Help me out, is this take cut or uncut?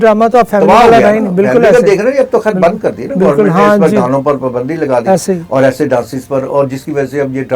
uncut